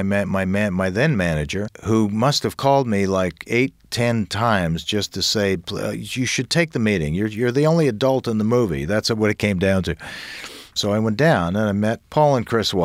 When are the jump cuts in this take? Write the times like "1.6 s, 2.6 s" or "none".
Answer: 10.7 s, 12.0 s